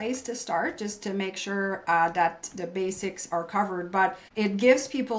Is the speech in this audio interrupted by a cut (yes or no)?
yes